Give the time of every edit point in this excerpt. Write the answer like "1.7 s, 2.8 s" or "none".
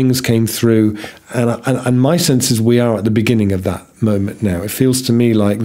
none